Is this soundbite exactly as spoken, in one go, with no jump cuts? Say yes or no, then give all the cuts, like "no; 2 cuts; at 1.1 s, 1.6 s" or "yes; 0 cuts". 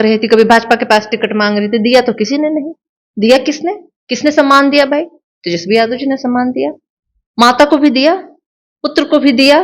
yes; 0 cuts